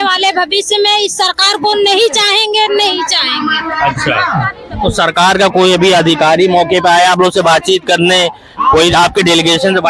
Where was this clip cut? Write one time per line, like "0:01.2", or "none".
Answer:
none